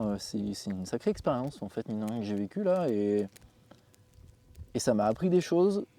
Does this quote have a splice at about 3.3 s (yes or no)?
no